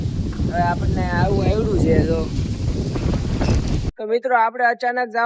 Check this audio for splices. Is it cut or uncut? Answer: cut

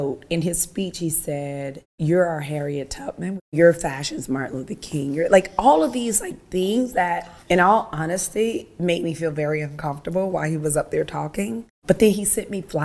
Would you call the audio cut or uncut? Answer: cut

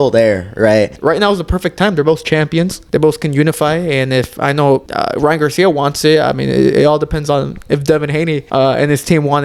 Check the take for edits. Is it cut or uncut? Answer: cut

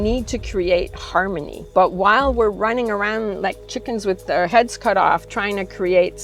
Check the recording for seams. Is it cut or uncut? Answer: cut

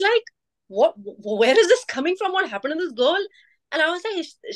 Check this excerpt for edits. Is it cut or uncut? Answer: uncut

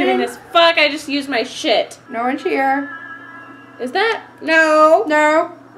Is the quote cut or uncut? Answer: cut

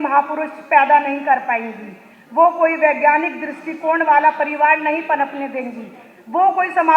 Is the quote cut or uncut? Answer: uncut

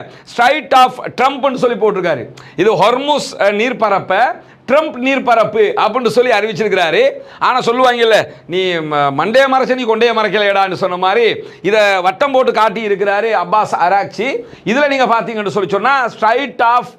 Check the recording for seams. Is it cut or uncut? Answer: uncut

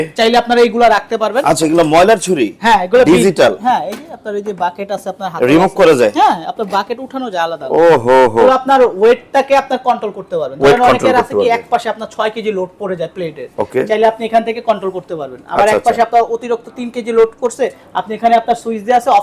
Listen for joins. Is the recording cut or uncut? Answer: cut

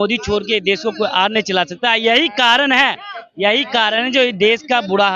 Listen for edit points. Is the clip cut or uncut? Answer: uncut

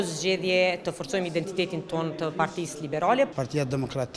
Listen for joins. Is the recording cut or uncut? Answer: uncut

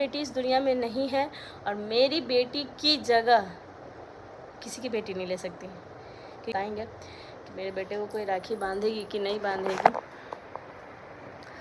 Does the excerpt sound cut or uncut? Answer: cut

